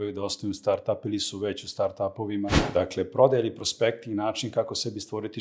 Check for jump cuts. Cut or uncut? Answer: cut